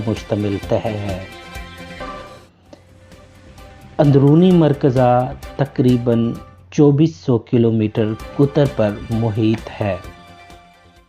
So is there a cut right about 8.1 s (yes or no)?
no